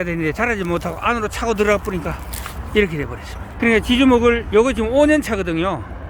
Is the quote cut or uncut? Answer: uncut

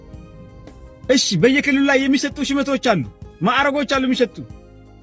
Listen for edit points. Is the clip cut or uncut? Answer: cut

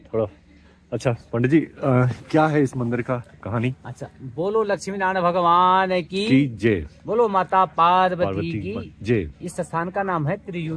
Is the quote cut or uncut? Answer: uncut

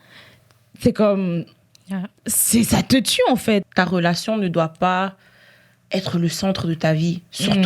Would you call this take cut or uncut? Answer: cut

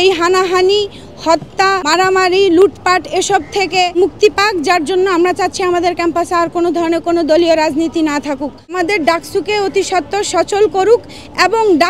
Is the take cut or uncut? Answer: cut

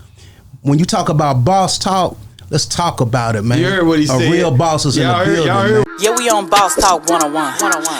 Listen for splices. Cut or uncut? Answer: cut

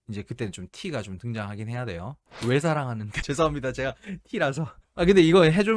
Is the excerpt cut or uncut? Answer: cut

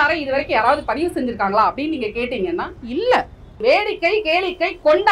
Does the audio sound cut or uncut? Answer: cut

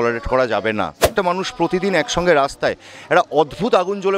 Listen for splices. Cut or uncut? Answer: cut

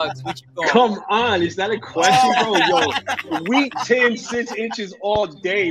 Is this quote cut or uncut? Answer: uncut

